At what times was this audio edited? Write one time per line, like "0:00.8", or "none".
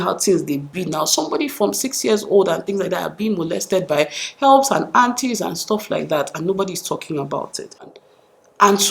0:07.9